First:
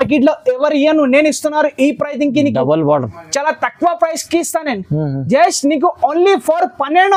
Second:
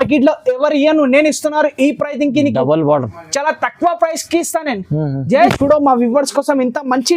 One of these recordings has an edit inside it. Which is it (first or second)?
second